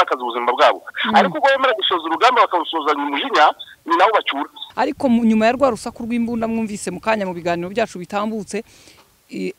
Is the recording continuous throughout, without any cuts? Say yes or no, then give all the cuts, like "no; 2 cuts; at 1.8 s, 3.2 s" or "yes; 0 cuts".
no; 2 cuts; at 0.9 s, 4.6 s